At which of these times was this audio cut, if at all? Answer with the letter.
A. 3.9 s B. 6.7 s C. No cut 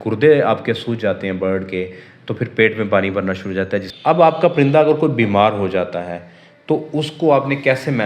A